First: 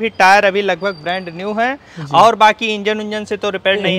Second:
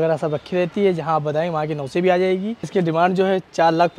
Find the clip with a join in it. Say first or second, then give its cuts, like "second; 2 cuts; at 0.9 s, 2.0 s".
second; 1 cut; at 2.7 s